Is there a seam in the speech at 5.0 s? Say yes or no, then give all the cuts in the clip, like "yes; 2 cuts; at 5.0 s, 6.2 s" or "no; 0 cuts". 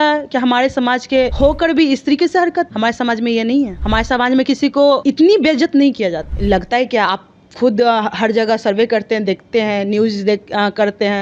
yes; 5 cuts; at 1.3 s, 2.7 s, 3.8 s, 5.0 s, 6.3 s